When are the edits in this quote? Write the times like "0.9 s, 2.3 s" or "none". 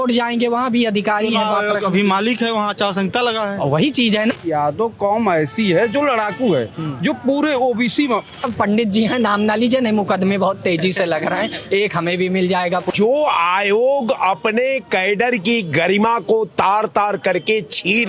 4.3 s, 8.5 s, 12.9 s